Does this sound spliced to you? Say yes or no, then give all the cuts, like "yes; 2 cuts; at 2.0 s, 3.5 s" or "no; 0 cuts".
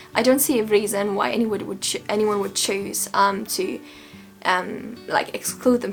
no; 0 cuts